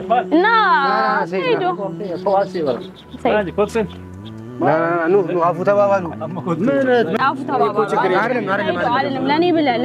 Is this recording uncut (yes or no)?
no